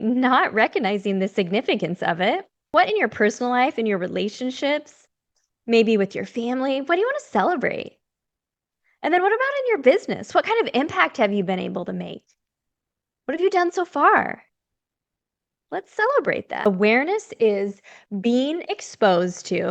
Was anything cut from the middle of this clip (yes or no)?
yes